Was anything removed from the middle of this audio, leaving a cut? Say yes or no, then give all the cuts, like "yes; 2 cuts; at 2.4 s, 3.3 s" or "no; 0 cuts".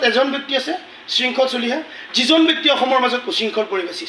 no; 0 cuts